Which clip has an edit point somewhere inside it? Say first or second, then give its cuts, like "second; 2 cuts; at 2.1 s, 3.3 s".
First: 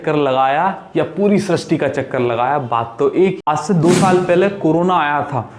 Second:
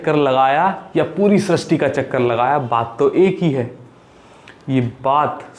first; 1 cut; at 3.4 s